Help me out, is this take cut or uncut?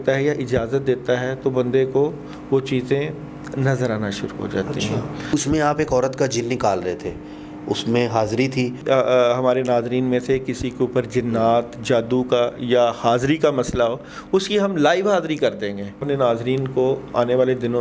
cut